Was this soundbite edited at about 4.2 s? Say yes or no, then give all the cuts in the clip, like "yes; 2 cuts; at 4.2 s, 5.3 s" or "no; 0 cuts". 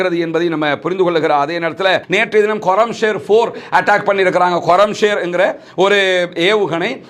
no; 1 cut; at 2.1 s